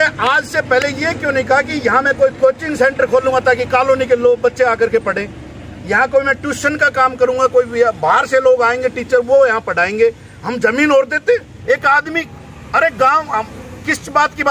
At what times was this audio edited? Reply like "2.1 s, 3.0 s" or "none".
11.5 s